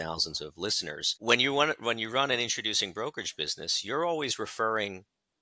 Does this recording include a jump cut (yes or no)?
yes